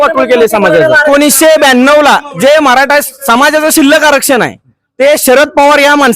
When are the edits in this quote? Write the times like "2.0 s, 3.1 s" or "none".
1.0 s